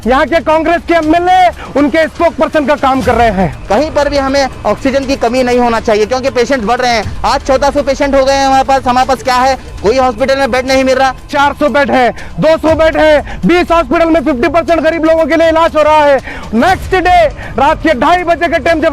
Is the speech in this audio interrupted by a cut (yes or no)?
yes